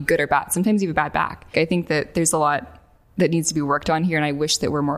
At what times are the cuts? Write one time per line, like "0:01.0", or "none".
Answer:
0:01.5